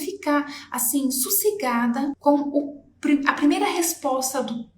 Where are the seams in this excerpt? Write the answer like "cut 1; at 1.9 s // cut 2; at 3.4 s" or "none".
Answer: cut 1; at 2.2 s